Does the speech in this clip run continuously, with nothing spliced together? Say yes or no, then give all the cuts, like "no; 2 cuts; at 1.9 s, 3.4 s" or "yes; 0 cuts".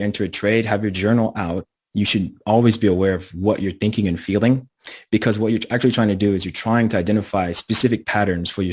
yes; 0 cuts